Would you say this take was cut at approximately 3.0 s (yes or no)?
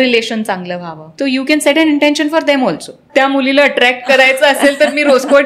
yes